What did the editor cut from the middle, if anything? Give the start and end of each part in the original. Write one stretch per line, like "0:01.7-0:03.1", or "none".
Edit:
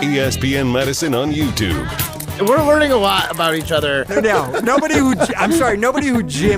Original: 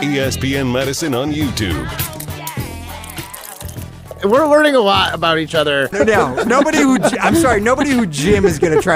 0:02.2-0:04.0